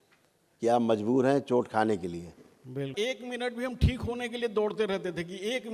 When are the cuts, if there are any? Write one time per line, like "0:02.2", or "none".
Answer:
0:02.9